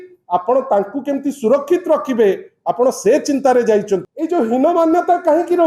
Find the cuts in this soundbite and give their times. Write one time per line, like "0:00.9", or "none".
0:04.1